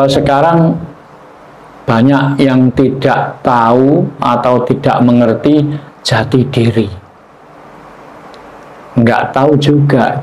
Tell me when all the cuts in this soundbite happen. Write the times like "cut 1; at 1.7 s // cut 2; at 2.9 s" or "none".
cut 1; at 7.3 s